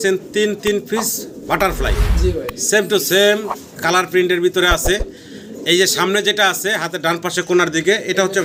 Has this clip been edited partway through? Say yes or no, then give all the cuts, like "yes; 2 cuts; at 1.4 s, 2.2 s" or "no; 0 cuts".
no; 0 cuts